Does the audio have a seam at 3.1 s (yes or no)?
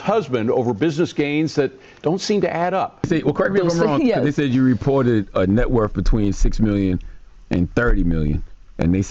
yes